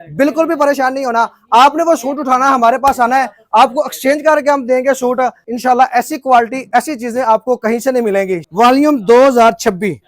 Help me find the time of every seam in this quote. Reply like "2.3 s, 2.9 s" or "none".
5.4 s, 8.4 s

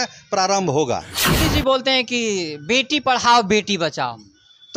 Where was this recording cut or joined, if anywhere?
1.4 s

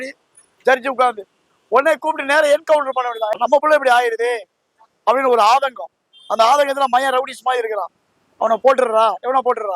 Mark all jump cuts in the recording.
3.4 s

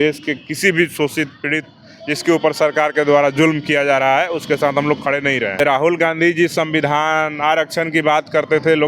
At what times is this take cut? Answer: 5.6 s

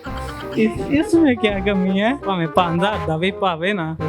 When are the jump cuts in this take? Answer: 2.2 s

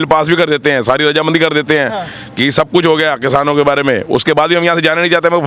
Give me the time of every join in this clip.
none

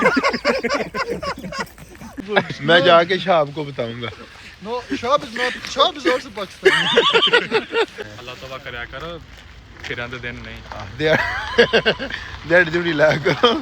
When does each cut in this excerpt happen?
2.2 s, 8.0 s

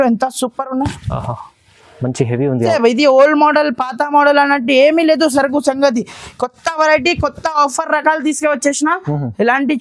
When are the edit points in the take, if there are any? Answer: 2.7 s

